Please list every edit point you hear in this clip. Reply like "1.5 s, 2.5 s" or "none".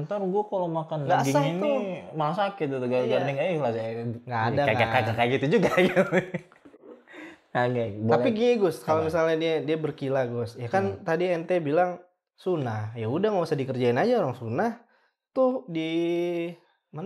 none